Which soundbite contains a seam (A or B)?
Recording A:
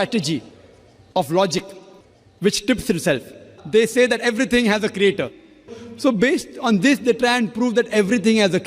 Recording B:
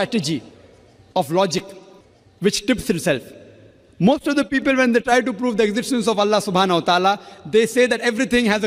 A